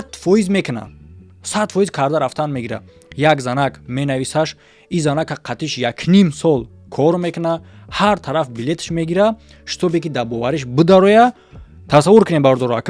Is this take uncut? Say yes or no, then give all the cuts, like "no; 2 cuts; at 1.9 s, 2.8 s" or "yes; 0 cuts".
yes; 0 cuts